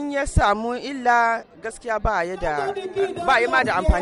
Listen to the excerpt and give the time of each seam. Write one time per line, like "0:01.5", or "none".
none